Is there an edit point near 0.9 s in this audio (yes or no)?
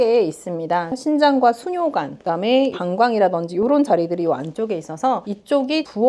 yes